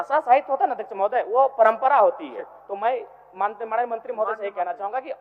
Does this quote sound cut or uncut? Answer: uncut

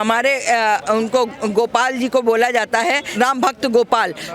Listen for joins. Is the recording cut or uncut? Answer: cut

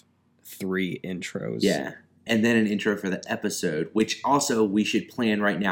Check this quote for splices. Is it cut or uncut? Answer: uncut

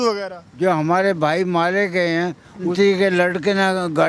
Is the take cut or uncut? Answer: uncut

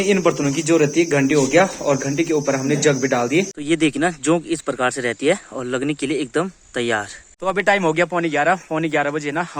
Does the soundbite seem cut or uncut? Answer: cut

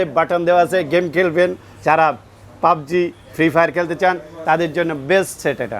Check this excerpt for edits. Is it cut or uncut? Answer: uncut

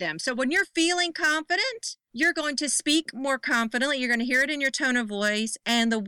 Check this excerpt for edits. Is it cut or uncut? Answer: uncut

